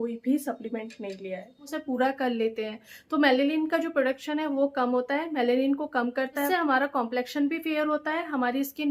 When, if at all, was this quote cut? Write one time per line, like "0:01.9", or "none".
0:01.8
0:06.5